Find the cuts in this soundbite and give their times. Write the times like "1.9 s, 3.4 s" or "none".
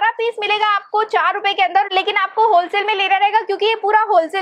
none